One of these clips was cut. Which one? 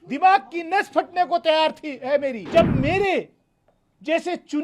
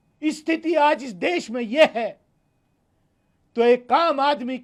first; 1 cut; at 2.4 s

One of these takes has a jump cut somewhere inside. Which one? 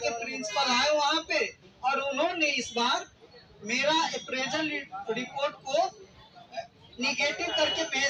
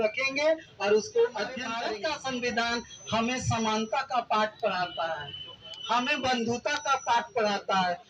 second; 1 cut; at 1.6 s

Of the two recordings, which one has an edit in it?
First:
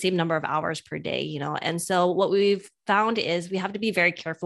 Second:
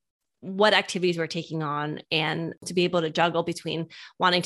second; 1 cut; at 2.6 s

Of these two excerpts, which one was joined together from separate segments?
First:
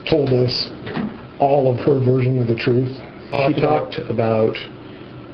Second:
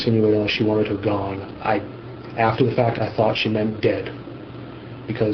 first; 1 cut; at 3.3 s

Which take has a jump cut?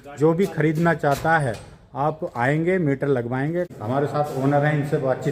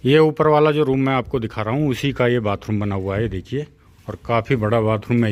first; 1 cut; at 3.8 s

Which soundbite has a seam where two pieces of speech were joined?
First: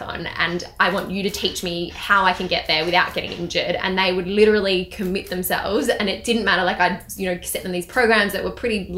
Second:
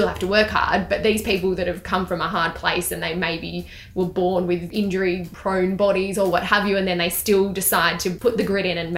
second; 2 cuts; at 5.0 s, 8.2 s

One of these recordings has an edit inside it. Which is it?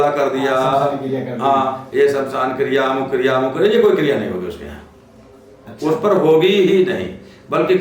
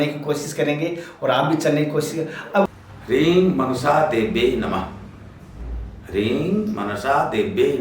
second; 1 cut; at 2.7 s

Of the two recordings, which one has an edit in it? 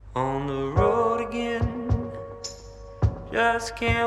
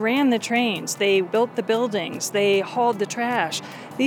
second; 1 cut; at 1.2 s

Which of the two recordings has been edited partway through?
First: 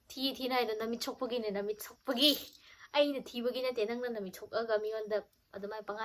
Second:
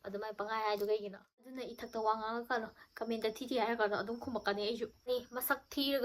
second; 2 cuts; at 1.6 s, 5.1 s

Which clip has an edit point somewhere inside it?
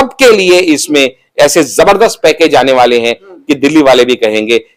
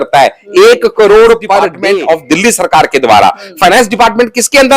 second; 1 cut; at 1.7 s

